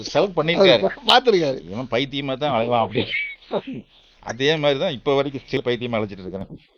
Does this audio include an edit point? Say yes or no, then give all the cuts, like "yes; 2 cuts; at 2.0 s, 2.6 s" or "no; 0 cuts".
yes; 1 cut; at 5.6 s